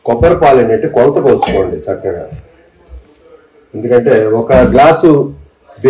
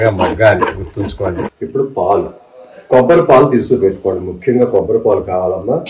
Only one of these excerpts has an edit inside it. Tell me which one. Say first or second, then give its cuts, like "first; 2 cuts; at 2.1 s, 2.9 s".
second; 1 cut; at 1.6 s